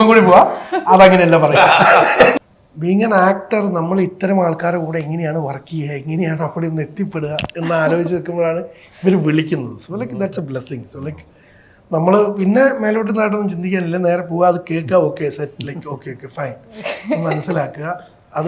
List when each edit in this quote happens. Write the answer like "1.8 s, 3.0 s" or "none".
2.4 s